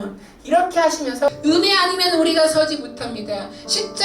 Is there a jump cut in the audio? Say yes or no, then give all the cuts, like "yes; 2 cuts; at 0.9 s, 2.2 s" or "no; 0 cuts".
yes; 1 cut; at 1.3 s